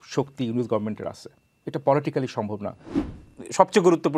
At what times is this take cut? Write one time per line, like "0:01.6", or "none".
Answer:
0:03.0